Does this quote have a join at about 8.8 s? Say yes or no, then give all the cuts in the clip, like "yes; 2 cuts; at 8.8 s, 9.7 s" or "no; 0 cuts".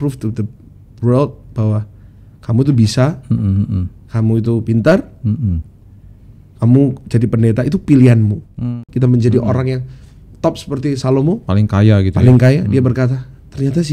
yes; 1 cut; at 8.8 s